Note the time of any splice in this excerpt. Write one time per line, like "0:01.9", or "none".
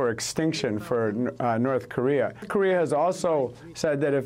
none